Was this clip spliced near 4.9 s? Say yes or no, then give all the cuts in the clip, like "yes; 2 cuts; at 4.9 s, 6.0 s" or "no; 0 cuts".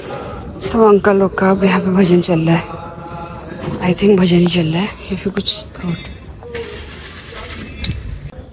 no; 0 cuts